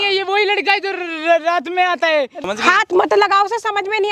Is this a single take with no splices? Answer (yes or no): no